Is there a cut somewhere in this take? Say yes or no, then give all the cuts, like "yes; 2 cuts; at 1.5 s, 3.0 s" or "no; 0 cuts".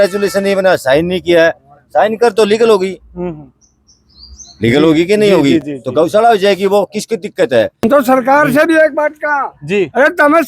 yes; 1 cut; at 7.8 s